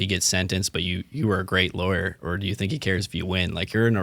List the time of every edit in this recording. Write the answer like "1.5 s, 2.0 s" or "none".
none